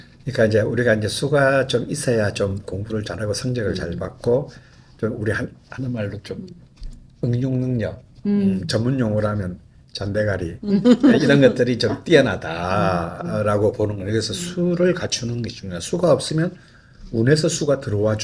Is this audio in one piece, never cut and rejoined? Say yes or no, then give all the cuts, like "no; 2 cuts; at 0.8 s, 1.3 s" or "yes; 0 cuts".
yes; 0 cuts